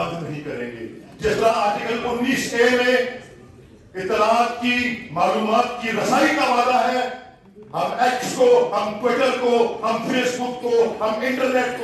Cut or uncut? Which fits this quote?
uncut